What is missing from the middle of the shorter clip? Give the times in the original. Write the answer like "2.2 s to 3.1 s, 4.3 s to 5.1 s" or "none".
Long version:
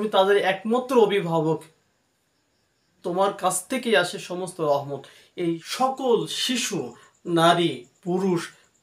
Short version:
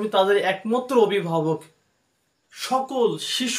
2.6 s to 5.7 s